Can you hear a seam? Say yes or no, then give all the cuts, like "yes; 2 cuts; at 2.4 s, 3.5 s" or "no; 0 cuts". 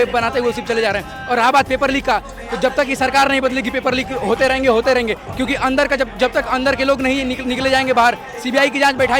no; 0 cuts